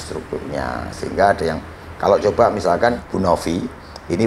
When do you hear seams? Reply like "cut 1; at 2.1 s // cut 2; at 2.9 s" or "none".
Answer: cut 1; at 3.0 s